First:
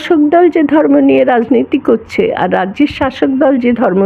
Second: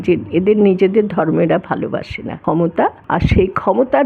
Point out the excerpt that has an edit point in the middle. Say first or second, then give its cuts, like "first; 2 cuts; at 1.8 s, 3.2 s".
second; 1 cut; at 2.7 s